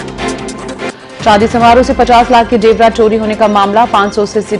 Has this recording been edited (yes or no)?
yes